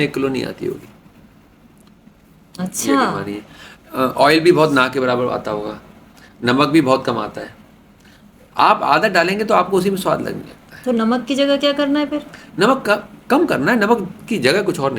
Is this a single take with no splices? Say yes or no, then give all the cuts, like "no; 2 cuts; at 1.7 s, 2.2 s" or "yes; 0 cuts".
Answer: yes; 0 cuts